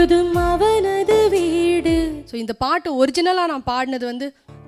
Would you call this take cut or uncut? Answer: cut